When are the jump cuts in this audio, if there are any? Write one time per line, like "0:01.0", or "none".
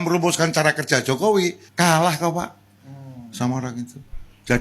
0:01.6